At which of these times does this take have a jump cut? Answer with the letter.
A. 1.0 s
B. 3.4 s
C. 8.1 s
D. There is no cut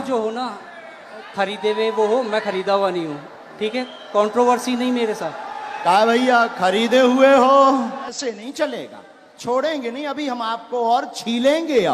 C